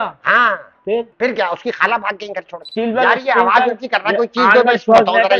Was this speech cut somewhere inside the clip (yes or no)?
yes